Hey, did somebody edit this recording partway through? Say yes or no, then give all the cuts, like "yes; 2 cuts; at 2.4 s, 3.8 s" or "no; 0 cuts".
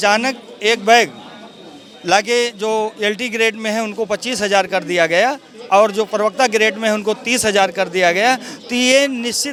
no; 0 cuts